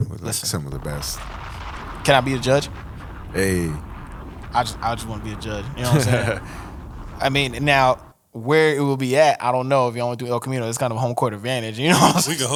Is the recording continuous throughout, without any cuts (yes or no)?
yes